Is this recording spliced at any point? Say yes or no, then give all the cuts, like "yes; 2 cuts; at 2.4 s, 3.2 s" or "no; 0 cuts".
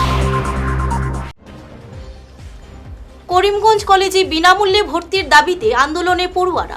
yes; 1 cut; at 2.2 s